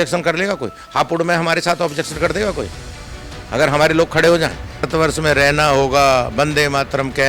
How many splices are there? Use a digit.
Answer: 1